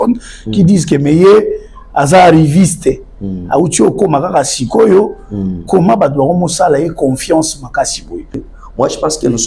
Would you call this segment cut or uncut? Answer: cut